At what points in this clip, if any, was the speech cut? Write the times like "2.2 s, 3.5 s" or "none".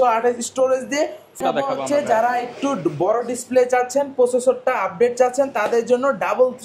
1.4 s